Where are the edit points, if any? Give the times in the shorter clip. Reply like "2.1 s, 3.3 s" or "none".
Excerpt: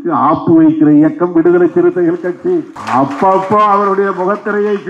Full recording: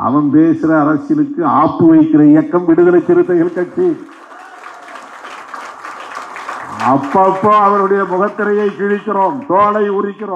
2.8 s